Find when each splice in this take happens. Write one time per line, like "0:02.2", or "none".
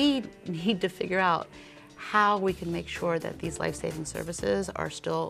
none